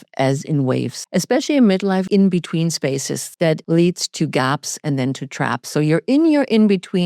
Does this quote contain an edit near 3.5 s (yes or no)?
yes